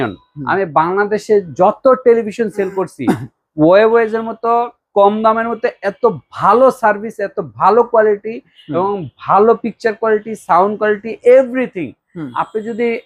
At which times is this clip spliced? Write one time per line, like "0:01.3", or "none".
none